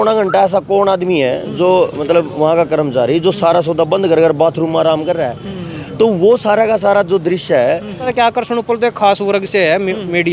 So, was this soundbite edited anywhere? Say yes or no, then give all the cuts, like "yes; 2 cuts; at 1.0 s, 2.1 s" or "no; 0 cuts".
yes; 1 cut; at 8.1 s